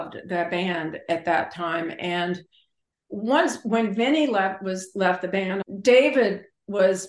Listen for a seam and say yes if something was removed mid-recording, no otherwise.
yes